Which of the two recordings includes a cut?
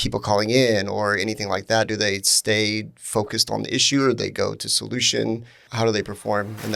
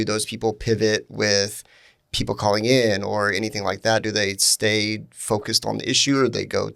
first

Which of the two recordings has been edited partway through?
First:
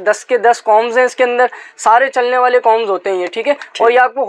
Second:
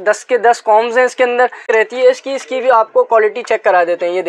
second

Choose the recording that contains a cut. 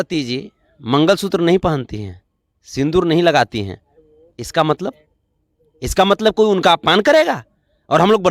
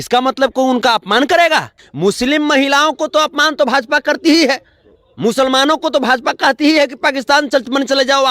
second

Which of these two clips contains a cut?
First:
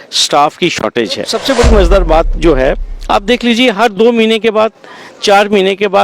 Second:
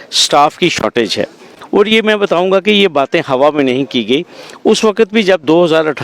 first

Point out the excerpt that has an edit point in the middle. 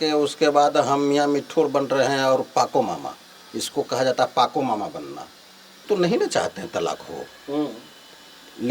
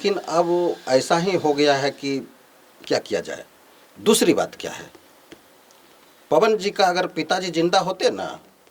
first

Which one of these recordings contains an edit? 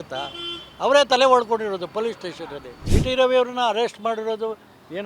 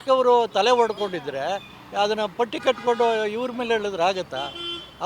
first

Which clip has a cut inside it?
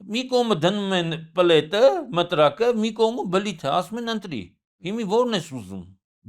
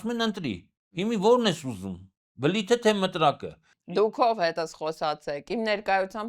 second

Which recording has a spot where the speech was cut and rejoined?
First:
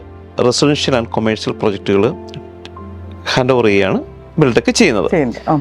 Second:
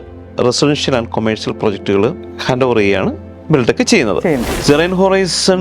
second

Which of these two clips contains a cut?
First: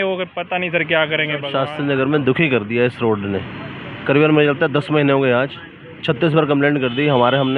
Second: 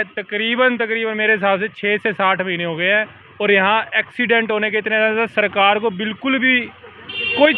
first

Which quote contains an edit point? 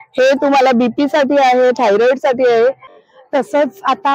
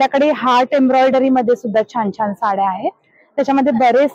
first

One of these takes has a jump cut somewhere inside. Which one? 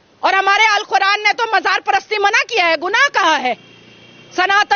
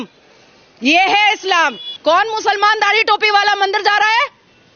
second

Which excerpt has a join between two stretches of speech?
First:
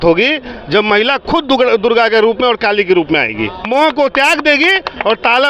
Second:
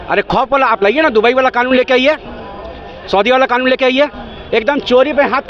first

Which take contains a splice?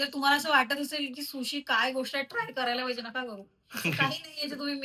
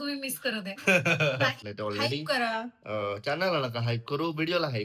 second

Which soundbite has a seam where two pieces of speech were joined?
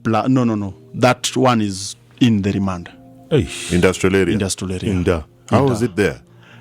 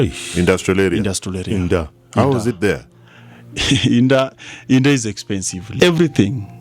second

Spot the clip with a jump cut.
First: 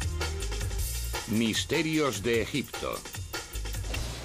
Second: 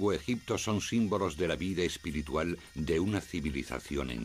first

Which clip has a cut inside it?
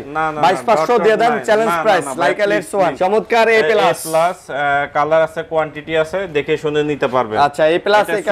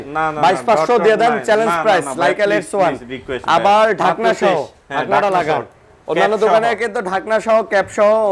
first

